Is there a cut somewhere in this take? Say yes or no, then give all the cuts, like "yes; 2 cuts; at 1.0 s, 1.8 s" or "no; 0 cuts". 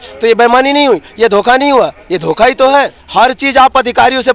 yes; 1 cut; at 3.0 s